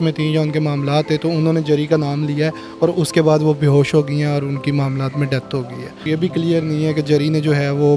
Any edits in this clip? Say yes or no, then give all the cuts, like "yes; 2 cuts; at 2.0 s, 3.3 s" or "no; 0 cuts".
yes; 1 cut; at 6.0 s